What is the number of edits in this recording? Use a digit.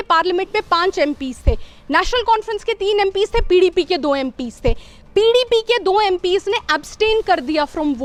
0